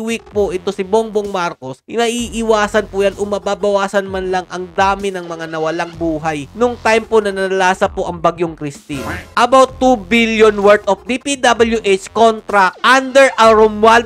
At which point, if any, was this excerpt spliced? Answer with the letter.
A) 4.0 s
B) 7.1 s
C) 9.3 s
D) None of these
C